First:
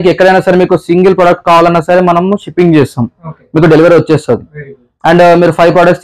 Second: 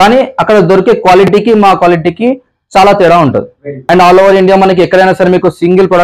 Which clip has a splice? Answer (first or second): second